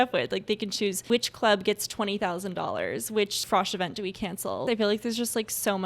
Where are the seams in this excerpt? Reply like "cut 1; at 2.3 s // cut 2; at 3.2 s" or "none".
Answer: cut 1; at 1.0 s // cut 2; at 3.4 s // cut 3; at 4.6 s